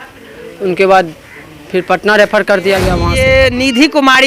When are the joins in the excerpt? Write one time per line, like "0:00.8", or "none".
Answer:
0:03.1